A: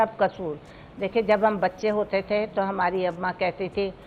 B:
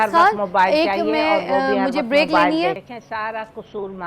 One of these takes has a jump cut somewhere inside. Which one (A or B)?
B